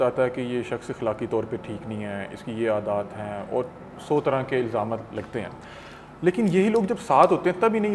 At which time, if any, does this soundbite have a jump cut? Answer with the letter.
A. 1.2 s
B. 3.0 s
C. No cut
C